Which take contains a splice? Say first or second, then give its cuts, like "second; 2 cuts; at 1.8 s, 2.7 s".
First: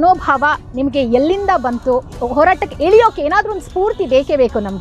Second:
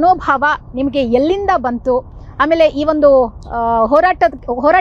first; 1 cut; at 2.2 s